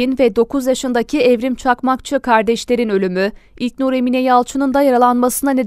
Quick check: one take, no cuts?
yes; 0 cuts

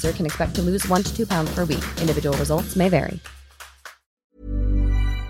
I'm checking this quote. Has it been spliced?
yes; 1 cut; at 4.2 s

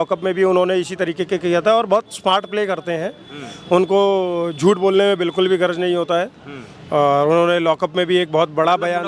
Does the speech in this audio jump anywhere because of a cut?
no; 0 cuts

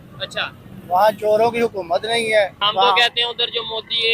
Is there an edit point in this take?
yes; 1 cut; at 2.6 s

